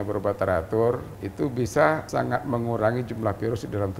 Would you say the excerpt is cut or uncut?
cut